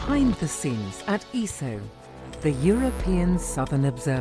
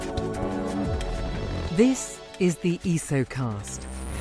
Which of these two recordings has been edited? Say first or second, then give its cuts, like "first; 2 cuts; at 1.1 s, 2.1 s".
second; 1 cut; at 1.6 s